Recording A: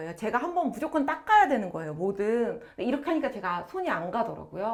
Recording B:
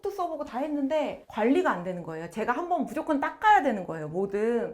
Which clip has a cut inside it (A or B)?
B